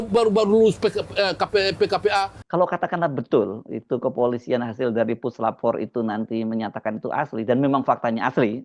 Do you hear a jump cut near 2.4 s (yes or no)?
yes